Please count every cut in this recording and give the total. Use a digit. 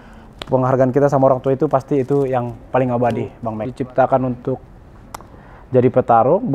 1